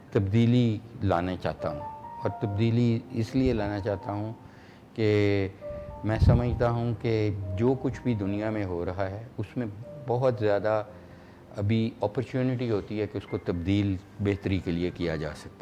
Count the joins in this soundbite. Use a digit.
0